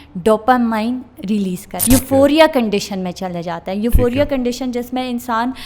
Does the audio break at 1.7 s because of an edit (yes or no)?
yes